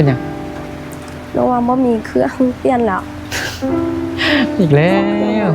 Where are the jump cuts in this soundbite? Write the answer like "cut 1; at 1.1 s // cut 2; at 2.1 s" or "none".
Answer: none